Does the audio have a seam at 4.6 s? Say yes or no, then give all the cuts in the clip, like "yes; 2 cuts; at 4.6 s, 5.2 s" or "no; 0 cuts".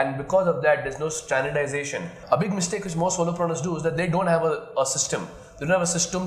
no; 1 cut; at 2.1 s